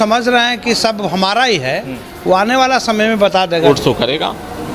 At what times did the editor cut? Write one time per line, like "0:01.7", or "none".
0:03.6